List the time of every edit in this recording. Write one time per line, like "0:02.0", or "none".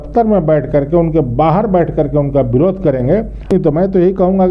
0:03.5